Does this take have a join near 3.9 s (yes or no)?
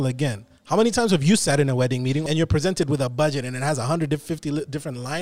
no